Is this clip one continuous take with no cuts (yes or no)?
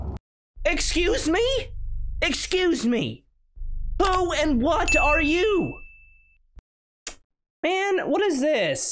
yes